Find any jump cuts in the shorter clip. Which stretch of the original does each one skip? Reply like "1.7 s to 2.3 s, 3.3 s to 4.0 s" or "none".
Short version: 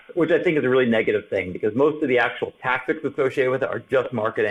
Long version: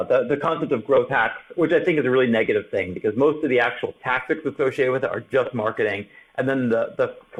none

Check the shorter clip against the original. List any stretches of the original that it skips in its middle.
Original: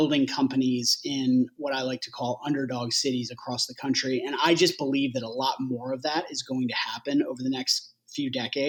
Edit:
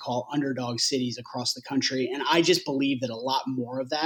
none

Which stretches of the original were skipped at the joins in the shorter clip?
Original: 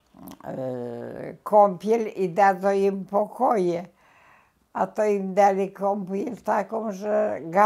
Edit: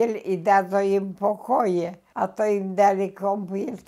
3.9 s to 4.6 s

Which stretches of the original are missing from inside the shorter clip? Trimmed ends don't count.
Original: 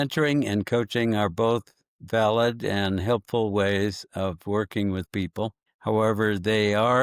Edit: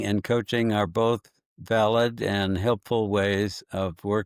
none

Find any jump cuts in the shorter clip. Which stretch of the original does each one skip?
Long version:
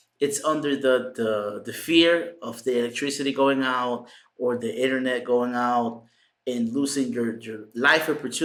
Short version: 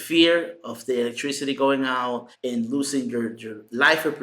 4.1 s to 6.3 s

